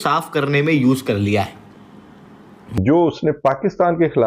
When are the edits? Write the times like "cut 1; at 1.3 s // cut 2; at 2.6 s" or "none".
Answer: cut 1; at 2.8 s